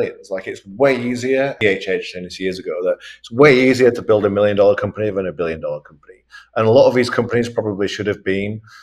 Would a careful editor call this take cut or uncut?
cut